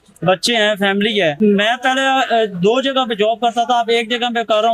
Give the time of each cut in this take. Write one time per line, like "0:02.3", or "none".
0:01.3